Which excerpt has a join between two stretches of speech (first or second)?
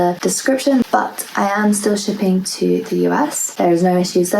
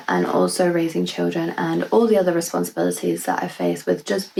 first